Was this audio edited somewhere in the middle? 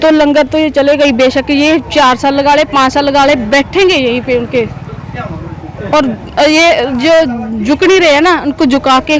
no; 0 cuts

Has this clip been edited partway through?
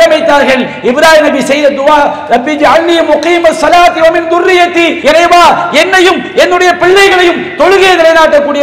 yes; 1 cut; at 4.9 s

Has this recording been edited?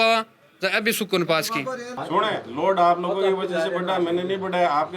yes; 1 cut; at 1.9 s

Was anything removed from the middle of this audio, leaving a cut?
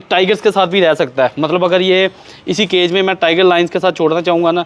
no; 0 cuts

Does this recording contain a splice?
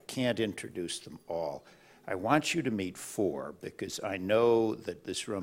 no; 0 cuts

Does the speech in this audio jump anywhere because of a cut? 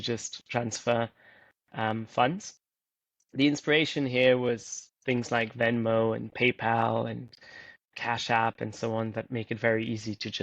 no; 0 cuts

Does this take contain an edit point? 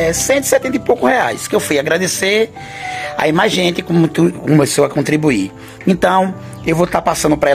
no; 0 cuts

